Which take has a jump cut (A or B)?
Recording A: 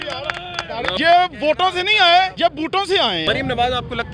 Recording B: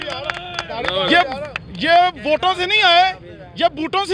A